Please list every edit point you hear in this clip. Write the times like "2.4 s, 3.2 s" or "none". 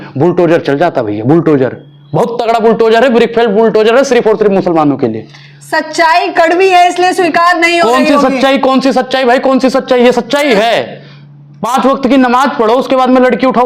none

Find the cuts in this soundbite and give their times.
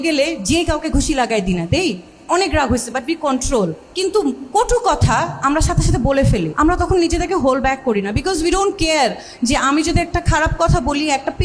3.8 s, 6.5 s

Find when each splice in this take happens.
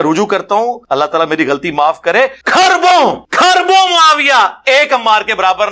0.8 s, 2.4 s, 3.2 s

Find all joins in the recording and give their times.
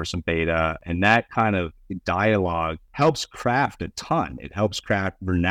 0.8 s, 2.8 s

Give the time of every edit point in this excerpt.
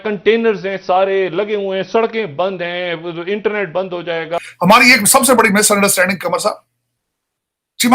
4.4 s

